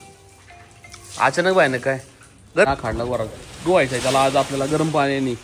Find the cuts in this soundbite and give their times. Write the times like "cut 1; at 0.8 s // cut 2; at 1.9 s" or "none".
cut 1; at 2.7 s